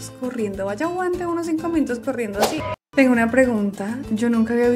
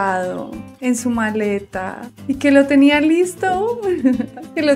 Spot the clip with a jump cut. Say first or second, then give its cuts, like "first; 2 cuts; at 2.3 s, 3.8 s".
first; 1 cut; at 2.6 s